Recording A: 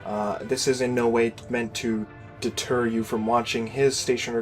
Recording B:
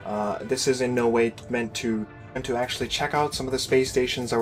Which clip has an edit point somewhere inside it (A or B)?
A